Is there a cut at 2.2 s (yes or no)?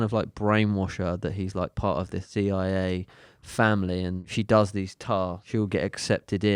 yes